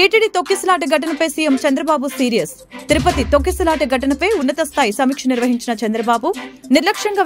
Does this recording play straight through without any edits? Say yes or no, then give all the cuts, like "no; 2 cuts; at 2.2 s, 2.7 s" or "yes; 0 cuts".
yes; 0 cuts